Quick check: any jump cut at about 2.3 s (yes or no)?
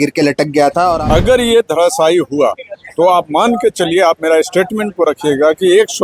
no